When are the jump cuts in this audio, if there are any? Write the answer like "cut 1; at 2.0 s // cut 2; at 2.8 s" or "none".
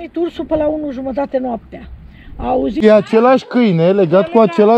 cut 1; at 2.8 s